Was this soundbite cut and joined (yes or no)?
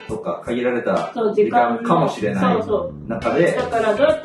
no